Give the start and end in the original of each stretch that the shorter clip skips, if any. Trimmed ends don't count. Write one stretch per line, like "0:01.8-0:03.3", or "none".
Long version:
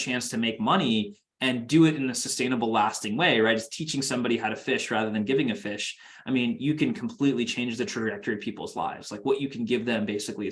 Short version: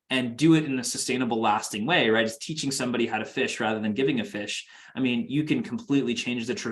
none

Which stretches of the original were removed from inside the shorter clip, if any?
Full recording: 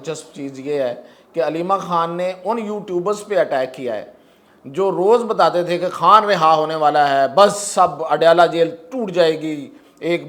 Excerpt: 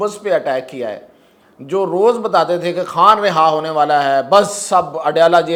none

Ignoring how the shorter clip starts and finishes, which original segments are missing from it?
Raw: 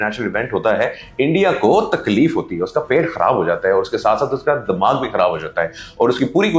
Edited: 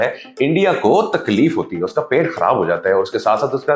none

